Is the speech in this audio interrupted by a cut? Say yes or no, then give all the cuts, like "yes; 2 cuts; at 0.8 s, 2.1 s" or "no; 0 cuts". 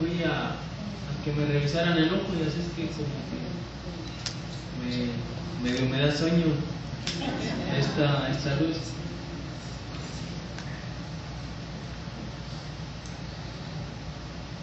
yes; 1 cut; at 6.4 s